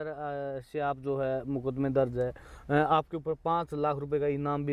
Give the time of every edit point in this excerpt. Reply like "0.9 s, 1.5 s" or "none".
none